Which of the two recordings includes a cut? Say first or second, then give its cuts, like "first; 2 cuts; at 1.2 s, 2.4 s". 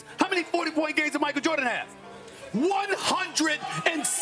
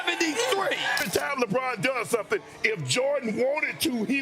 second; 1 cut; at 0.9 s